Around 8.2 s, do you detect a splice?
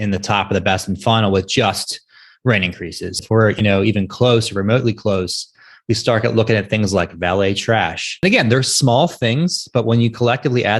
yes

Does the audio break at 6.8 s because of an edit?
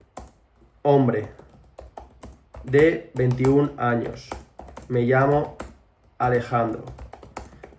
no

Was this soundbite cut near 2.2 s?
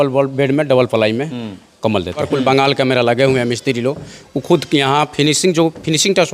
yes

